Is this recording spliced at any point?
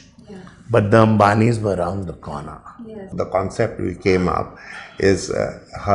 yes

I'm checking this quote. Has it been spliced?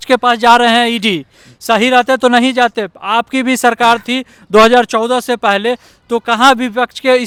no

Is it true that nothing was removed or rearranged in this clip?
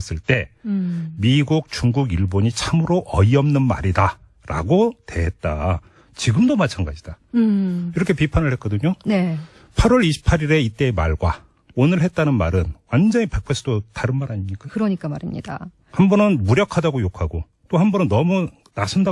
yes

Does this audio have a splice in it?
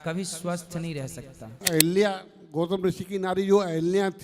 yes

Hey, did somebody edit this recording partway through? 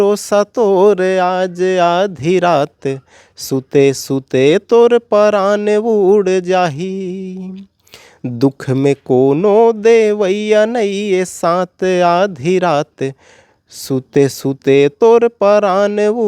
no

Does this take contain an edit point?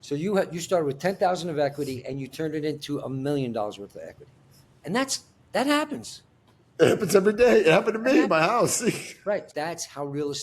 yes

